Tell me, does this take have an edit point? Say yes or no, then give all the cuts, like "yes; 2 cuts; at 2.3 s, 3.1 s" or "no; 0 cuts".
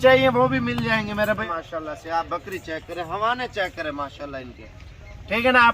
yes; 1 cut; at 1.4 s